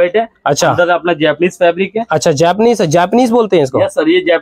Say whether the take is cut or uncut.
uncut